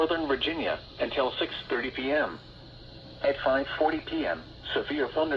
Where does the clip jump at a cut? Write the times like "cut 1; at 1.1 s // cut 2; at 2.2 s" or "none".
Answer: cut 1; at 0.9 s // cut 2; at 4.1 s